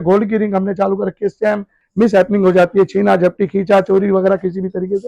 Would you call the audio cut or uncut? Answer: cut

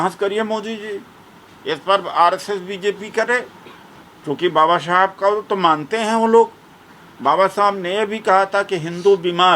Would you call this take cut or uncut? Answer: uncut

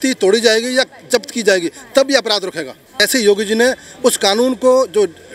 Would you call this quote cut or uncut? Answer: cut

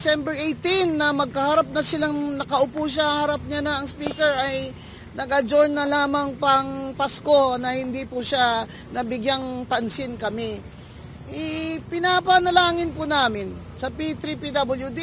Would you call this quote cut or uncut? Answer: uncut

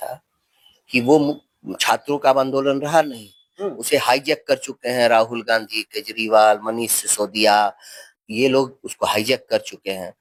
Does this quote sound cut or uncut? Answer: uncut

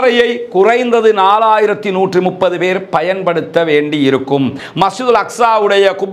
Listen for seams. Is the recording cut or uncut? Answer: cut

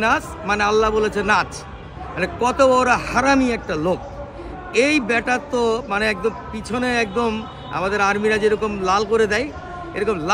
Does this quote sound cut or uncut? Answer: uncut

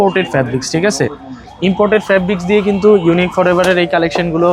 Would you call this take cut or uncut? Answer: uncut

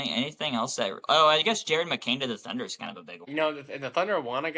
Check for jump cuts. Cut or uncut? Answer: cut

